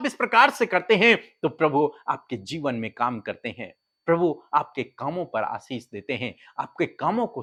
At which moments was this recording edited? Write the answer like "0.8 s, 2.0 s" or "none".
none

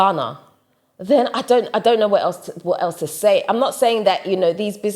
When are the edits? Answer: none

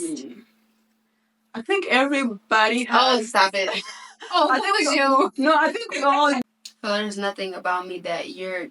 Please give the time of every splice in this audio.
6.4 s

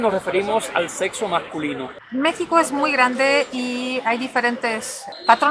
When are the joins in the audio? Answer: 1.9 s

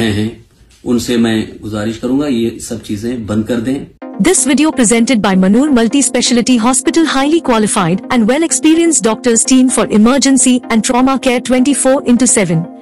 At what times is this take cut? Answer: 4.0 s

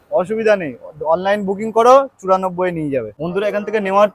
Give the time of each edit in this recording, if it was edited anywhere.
3.2 s

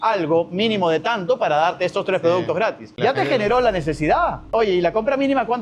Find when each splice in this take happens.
2.9 s, 4.5 s

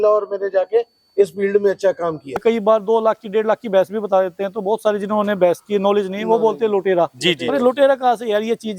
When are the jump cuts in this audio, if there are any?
2.4 s

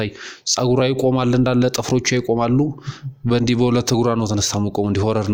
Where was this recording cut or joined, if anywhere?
none

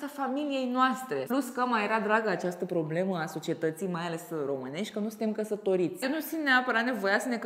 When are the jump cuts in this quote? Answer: 1.3 s, 6.0 s

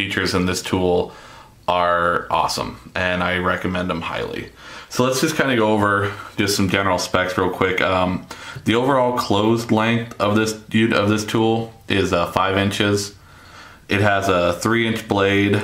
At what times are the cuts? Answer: 6.5 s

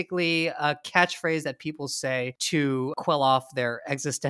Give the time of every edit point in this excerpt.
2.9 s

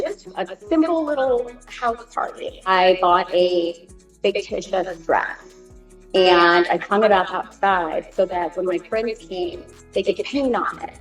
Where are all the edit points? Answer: 9.9 s

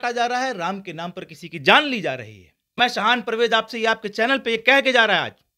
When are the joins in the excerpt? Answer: 2.8 s

